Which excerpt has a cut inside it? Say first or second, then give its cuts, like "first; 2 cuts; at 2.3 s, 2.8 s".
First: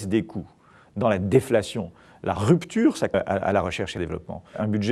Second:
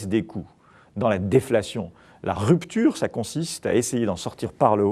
second; 1 cut; at 3.1 s